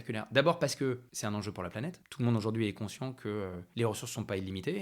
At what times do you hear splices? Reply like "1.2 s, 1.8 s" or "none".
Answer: 1.1 s, 2.0 s, 3.6 s